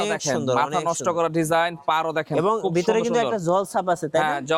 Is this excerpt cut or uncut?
uncut